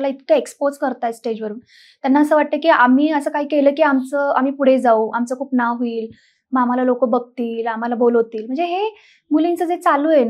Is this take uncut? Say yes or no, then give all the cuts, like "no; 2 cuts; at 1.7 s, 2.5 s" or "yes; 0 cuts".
yes; 0 cuts